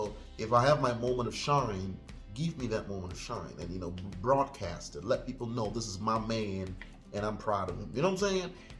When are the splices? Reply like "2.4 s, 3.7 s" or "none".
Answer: none